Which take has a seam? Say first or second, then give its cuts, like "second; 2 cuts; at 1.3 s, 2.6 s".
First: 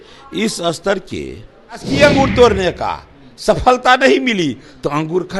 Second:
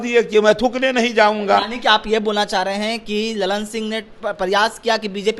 first; 1 cut; at 1.9 s